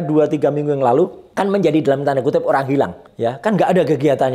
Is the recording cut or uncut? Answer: cut